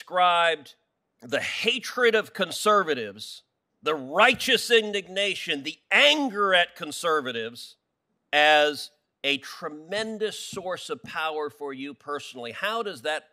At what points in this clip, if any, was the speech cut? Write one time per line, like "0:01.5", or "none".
none